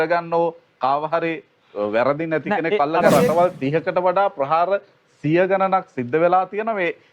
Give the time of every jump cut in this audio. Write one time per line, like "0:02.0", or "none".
0:03.0